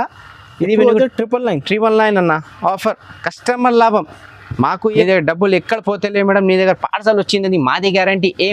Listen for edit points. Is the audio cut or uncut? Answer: cut